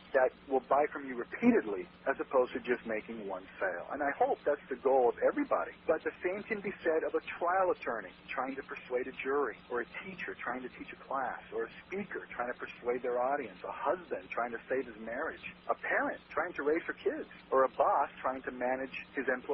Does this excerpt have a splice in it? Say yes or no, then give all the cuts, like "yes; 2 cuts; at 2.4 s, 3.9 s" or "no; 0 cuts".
no; 0 cuts